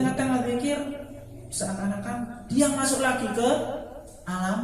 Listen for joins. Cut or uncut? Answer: uncut